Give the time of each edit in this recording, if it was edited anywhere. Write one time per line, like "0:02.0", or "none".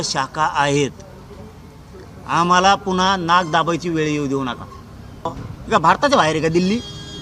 0:05.4